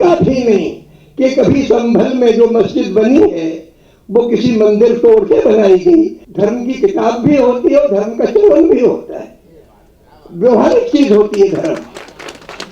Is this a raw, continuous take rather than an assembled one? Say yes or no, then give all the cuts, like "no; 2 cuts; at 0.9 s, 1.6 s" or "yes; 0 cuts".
no; 1 cut; at 6.2 s